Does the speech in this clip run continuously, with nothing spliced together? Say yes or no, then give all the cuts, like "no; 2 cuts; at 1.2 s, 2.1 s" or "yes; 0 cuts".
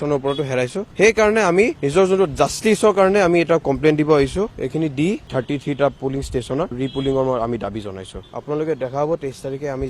no; 2 cuts; at 4.5 s, 8.2 s